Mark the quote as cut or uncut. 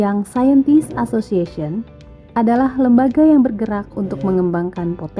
cut